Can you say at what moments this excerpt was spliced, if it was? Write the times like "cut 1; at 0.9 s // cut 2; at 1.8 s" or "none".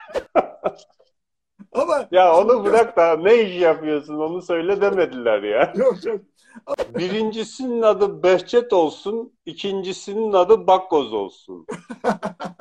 cut 1; at 6.8 s